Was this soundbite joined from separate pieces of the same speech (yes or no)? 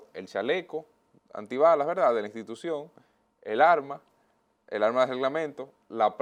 no